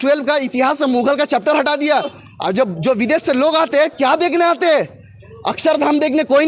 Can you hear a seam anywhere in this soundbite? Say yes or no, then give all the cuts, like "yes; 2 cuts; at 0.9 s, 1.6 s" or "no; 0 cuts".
yes; 1 cut; at 2.2 s